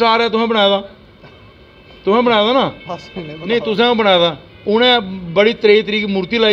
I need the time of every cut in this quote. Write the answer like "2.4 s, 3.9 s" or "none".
none

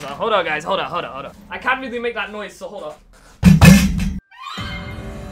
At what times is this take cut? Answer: 4.2 s

